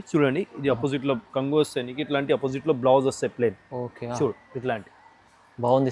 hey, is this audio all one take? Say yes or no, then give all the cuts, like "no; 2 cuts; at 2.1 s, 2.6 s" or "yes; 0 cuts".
yes; 0 cuts